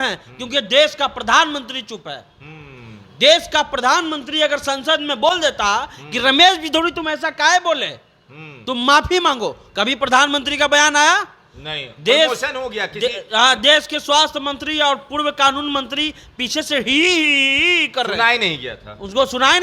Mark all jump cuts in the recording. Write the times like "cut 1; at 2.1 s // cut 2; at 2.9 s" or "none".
none